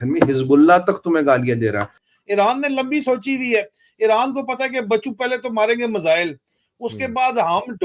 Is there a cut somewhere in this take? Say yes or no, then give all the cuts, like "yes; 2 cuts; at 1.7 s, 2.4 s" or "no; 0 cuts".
yes; 1 cut; at 2.0 s